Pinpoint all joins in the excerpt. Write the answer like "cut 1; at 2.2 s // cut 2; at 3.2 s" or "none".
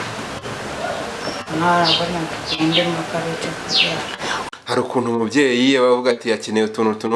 cut 1; at 4.4 s